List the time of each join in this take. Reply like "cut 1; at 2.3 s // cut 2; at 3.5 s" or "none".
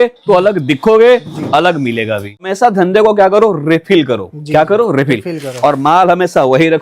cut 1; at 2.4 s